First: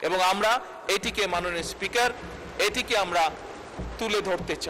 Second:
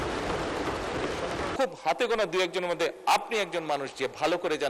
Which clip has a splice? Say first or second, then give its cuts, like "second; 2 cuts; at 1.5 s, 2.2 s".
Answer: second; 1 cut; at 1.5 s